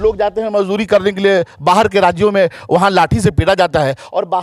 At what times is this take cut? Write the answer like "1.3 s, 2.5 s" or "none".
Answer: none